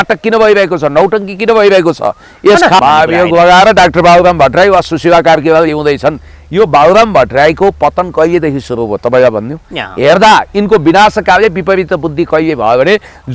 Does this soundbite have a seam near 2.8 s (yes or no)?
yes